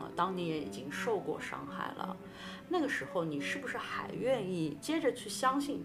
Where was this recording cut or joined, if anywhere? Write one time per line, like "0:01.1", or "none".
0:04.8